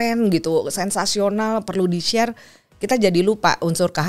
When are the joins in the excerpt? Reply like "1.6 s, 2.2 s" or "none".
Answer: none